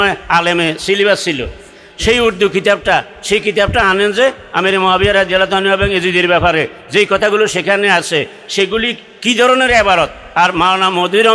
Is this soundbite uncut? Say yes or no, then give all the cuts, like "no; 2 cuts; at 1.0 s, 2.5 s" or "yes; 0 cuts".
yes; 0 cuts